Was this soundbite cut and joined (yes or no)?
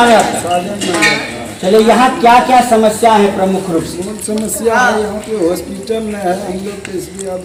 no